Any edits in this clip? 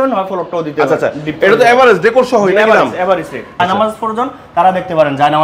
yes; 1 cut; at 3.6 s

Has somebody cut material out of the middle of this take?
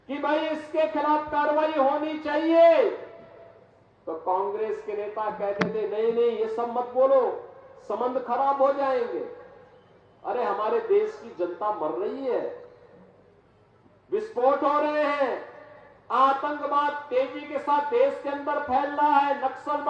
no; 0 cuts

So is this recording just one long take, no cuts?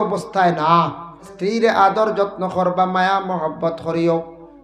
no; 1 cut; at 1.3 s

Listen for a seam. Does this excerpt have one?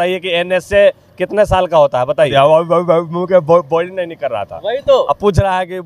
yes; 1 cut; at 2.3 s

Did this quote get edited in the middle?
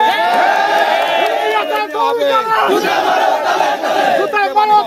no; 0 cuts

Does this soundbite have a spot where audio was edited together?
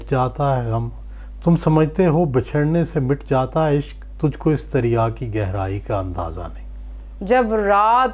yes; 1 cut; at 7.0 s

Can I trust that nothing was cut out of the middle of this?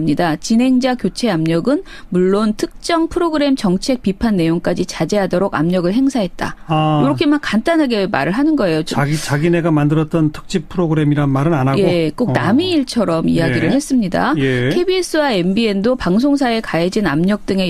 no; 1 cut; at 15.6 s

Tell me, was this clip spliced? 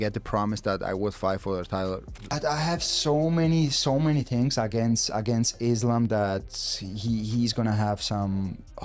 yes; 1 cut; at 2.1 s

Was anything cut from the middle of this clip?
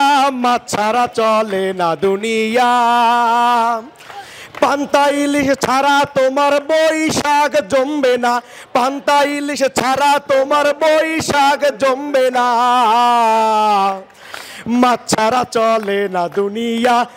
no; 0 cuts

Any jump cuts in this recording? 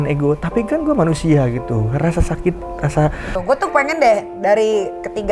yes; 1 cut; at 3.3 s

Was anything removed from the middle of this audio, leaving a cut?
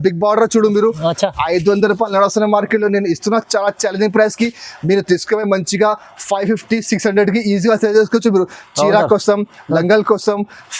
no; 0 cuts

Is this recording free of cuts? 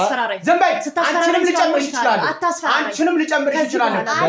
yes; 0 cuts

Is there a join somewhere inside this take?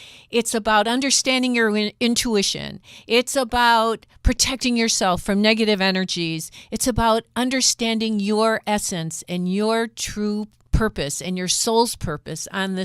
yes; 1 cut; at 10.6 s

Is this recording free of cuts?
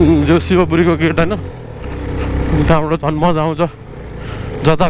yes; 0 cuts

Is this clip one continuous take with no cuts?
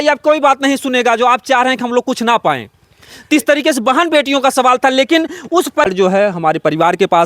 no; 1 cut; at 5.9 s

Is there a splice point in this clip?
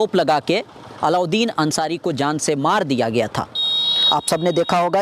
no; 0 cuts

